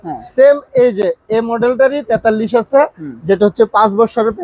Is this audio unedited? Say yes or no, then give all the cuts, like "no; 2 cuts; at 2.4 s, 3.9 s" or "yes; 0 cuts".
yes; 0 cuts